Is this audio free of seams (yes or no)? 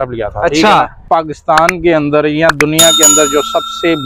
no